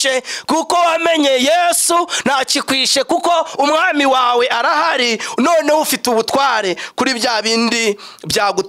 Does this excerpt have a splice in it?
no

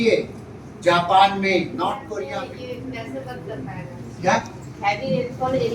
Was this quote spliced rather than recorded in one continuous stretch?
yes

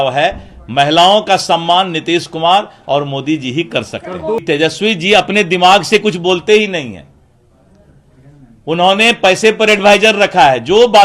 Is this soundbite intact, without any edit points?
no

